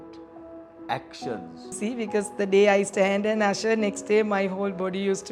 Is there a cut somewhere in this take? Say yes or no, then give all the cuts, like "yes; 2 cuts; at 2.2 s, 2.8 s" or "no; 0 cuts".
yes; 1 cut; at 1.8 s